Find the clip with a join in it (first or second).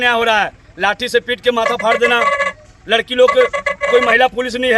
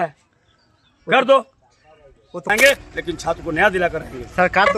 second